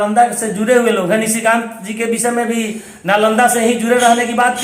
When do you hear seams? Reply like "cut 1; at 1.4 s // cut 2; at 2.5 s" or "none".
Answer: none